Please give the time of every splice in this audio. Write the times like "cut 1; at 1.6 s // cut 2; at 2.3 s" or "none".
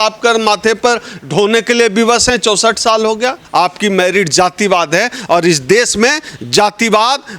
cut 1; at 3.4 s